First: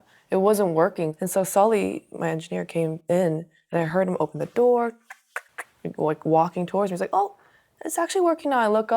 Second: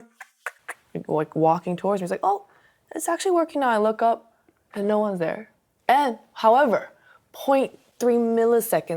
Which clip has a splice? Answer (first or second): first